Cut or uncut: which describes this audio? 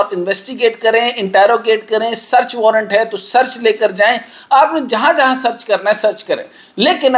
uncut